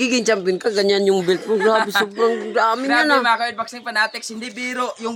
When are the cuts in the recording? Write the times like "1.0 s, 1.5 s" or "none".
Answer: none

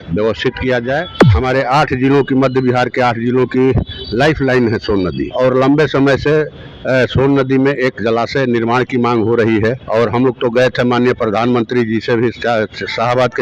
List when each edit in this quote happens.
1.2 s, 5.2 s, 9.8 s

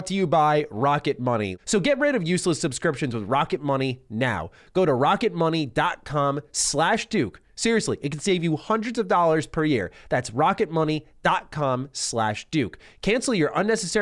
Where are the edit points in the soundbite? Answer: 1.5 s

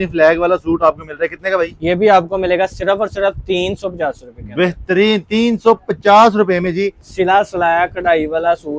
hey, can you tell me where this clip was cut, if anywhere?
7.0 s

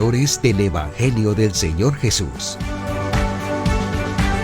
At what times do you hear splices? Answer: 2.4 s

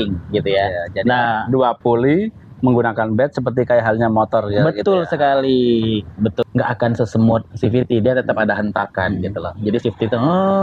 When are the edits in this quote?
6.4 s

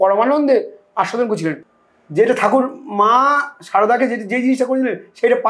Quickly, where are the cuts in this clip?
1.7 s

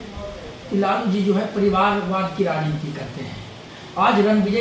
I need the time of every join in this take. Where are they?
none

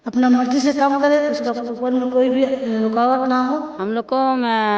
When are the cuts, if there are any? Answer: 3.7 s

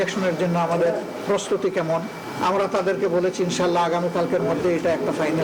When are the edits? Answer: 2.2 s

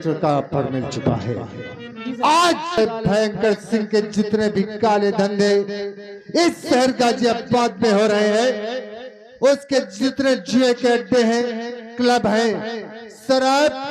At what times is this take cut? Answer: 2.8 s

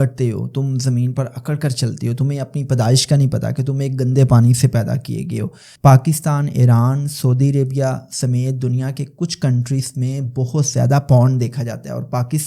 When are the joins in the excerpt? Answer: 5.6 s

